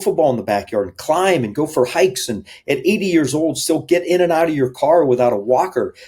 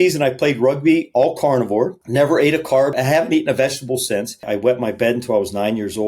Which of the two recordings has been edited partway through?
second; 3 cuts; at 2.0 s, 2.9 s, 4.5 s

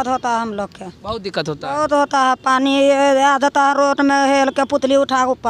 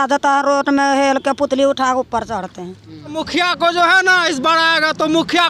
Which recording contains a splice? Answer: second; 1 cut; at 3.2 s

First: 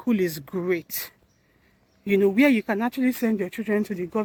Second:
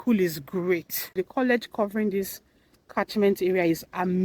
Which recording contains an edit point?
second; 1 cut; at 1.2 s

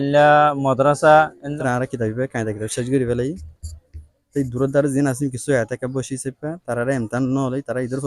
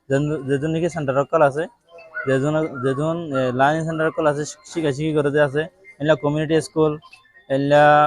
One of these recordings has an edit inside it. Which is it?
first; 1 cut; at 1.5 s

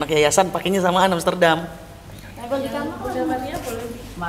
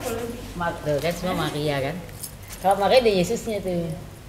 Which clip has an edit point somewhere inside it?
first; 1 cut; at 2.2 s

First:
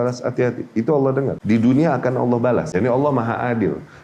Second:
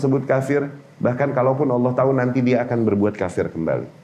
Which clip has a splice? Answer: first; 2 cuts; at 1.4 s, 2.7 s

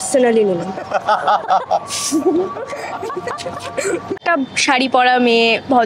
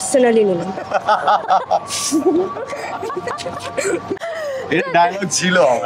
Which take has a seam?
first; 1 cut; at 4.2 s

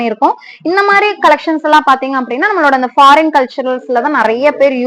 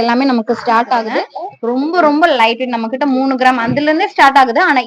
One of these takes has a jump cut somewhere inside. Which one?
second; 1 cut; at 1.1 s

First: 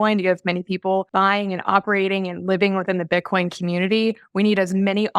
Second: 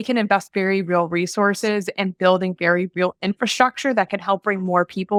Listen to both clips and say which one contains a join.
first; 1 cut; at 1.1 s

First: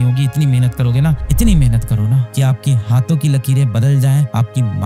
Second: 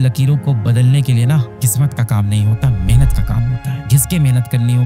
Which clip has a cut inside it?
second; 1 cut; at 3.8 s

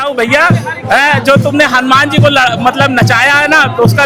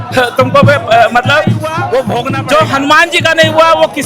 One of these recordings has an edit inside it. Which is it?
second; 1 cut; at 2.4 s

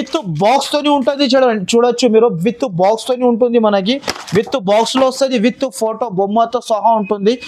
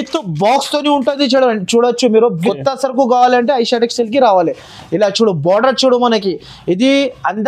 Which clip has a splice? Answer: second; 1 cut; at 2.5 s

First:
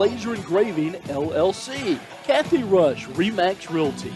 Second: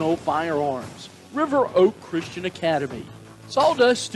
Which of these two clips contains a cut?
first; 1 cut; at 2.1 s

